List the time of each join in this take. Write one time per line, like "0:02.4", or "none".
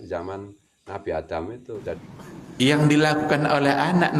0:02.0